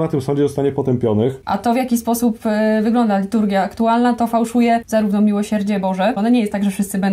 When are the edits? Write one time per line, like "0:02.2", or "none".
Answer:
0:01.4
0:04.9
0:06.2